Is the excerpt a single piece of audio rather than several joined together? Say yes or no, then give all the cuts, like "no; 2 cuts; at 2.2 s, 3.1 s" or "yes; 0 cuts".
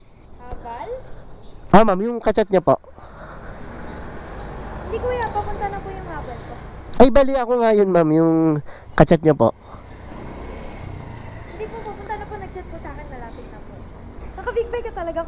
no; 1 cut; at 13.7 s